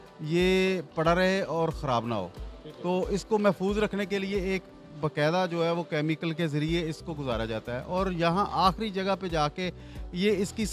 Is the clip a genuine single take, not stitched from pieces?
yes; 0 cuts

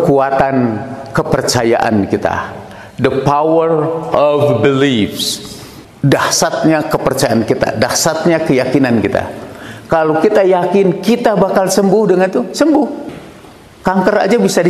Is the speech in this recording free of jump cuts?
yes; 0 cuts

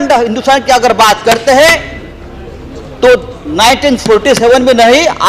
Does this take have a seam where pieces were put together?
no; 0 cuts

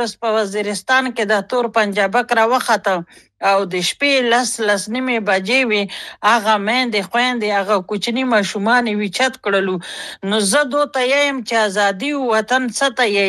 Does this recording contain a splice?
no; 0 cuts

